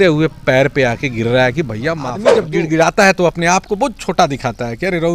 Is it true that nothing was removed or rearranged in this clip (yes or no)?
no